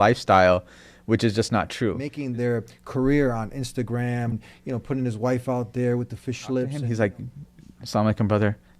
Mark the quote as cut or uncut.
cut